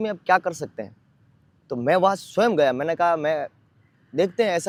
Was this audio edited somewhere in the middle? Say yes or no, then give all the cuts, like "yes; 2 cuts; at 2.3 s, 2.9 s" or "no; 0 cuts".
no; 0 cuts